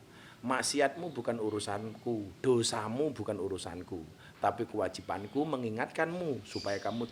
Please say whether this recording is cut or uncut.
uncut